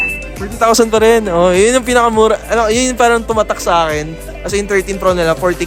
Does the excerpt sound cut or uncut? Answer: uncut